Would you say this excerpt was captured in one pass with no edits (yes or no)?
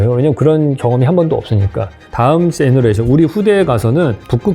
no